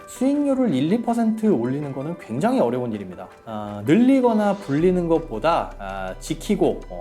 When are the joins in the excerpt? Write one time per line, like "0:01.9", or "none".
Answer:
0:03.4